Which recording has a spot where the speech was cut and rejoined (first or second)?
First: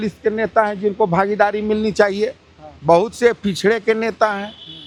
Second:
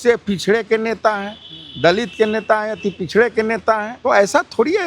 second